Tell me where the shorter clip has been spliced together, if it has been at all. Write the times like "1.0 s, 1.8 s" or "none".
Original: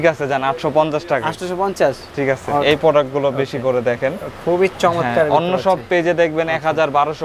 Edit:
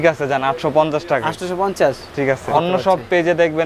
2.5 s